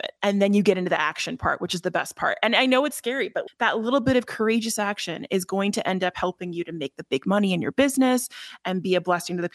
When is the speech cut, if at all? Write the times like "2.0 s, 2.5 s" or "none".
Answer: none